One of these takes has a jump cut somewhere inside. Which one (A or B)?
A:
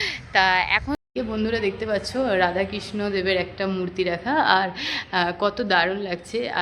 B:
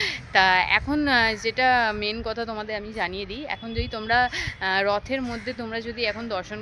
A